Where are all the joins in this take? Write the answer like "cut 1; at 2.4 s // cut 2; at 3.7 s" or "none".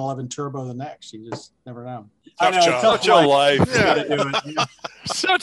cut 1; at 2.2 s